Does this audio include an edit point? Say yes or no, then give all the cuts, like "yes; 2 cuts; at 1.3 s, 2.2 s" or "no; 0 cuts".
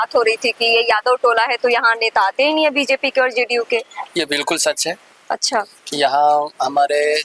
no; 0 cuts